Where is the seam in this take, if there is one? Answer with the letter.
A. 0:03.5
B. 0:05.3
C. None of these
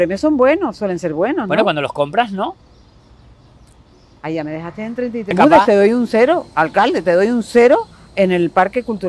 B